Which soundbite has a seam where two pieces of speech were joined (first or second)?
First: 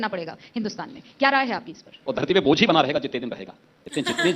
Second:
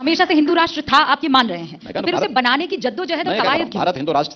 first